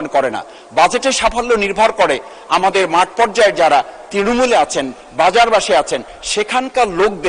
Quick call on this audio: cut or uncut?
uncut